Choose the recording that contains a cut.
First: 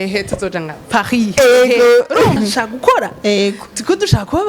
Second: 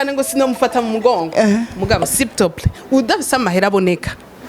first; 1 cut; at 2.4 s

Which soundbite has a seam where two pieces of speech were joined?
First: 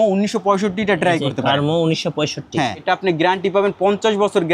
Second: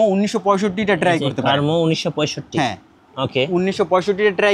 first; 1 cut; at 2.8 s

